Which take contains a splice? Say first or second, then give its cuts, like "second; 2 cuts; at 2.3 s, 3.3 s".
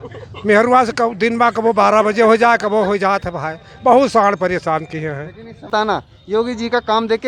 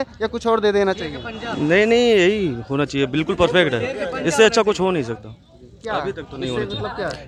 first; 1 cut; at 5.7 s